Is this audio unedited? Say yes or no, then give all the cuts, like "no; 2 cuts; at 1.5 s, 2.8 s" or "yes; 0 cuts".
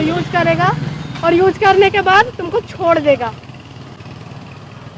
yes; 0 cuts